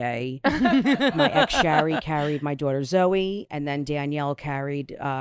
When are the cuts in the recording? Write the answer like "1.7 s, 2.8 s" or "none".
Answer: 1.2 s